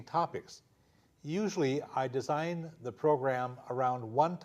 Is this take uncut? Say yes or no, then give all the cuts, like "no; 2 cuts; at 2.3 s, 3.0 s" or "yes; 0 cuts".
no; 1 cut; at 2.9 s